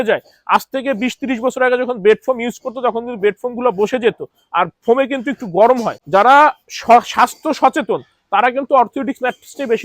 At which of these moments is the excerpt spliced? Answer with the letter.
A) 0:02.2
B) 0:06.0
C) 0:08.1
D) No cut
B